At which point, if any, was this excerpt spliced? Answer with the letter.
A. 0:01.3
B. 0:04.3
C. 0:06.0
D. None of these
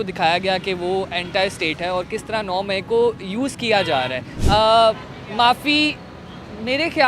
B